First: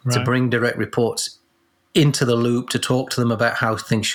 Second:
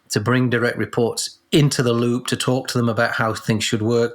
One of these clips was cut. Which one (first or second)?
second